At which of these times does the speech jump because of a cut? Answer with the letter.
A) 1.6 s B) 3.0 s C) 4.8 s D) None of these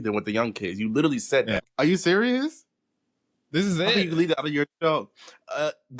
A